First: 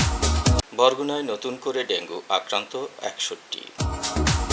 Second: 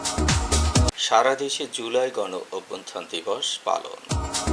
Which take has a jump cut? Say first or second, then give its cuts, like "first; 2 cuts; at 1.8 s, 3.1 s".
second; 1 cut; at 0.9 s